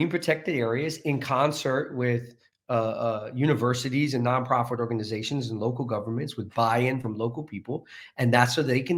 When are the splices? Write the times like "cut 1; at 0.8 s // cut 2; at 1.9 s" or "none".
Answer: none

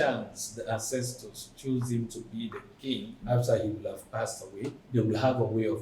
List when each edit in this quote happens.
cut 1; at 3.2 s // cut 2; at 4.8 s

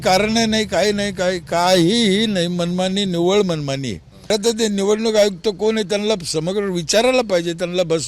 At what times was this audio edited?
cut 1; at 4.3 s

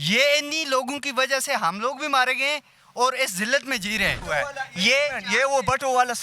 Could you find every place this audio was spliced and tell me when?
cut 1; at 4.2 s

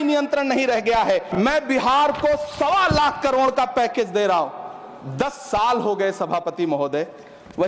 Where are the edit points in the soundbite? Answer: cut 1; at 1.3 s

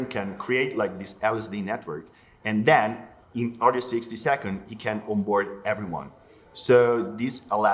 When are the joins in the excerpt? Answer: none

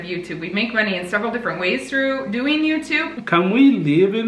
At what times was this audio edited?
cut 1; at 3.1 s

